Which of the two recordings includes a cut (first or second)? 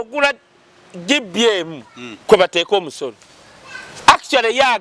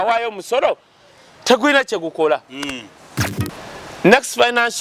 second